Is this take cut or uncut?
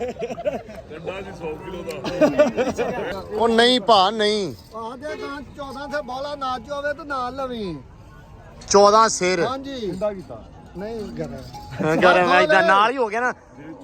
cut